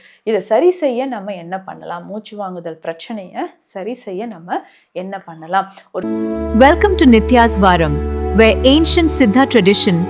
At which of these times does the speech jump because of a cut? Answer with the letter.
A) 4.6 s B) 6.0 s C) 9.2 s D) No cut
B